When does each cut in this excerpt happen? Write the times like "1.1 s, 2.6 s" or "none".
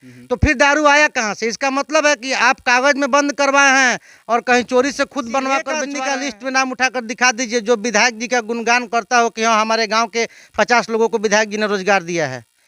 6.0 s